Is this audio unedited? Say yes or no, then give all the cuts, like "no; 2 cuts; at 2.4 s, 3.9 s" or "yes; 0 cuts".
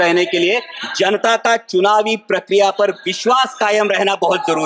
yes; 0 cuts